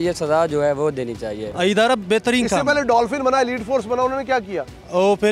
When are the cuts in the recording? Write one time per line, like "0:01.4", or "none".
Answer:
0:01.4